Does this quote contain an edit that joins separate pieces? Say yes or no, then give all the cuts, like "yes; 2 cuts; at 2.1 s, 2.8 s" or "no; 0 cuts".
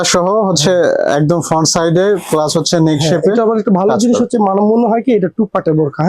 no; 0 cuts